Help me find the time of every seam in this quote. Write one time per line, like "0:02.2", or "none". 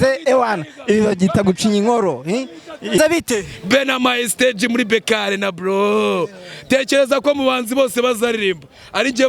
0:03.0